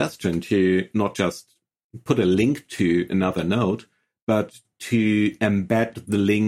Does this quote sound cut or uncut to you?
uncut